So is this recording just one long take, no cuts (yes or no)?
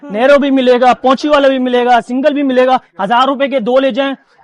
yes